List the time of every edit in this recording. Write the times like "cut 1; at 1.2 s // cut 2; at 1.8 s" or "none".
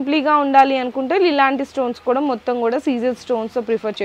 none